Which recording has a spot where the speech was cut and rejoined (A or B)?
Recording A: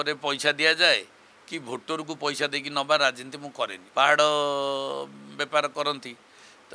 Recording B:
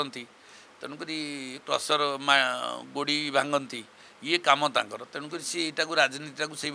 A